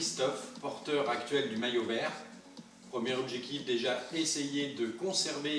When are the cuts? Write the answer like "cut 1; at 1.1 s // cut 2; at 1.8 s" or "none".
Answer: none